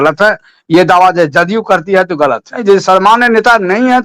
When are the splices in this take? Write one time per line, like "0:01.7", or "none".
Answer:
0:02.6